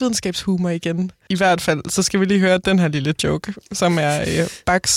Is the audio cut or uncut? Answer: cut